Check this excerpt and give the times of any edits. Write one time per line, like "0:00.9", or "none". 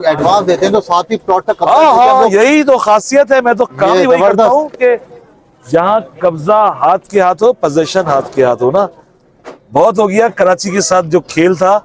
none